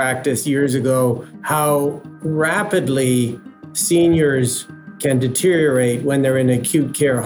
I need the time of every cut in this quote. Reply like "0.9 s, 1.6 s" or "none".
1.3 s, 2.1 s